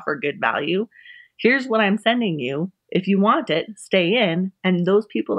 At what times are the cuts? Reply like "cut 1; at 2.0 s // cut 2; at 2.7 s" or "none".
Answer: none